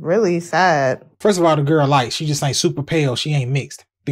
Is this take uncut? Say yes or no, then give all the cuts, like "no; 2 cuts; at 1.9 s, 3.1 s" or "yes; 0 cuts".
no; 1 cut; at 1.1 s